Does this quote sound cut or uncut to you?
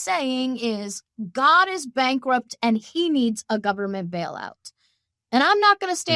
uncut